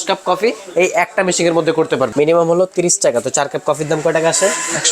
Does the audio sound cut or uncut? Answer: cut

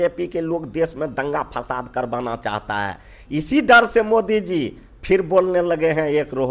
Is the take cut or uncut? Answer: uncut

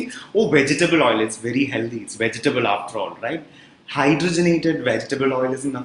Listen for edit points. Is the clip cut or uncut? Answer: uncut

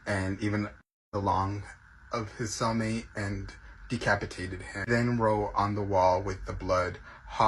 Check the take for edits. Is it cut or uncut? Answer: cut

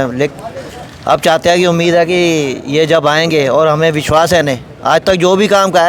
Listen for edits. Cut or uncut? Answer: uncut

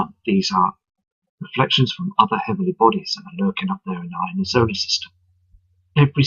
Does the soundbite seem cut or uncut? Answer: cut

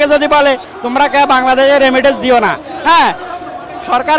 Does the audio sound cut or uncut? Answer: uncut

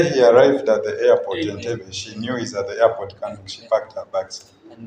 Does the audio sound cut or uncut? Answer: uncut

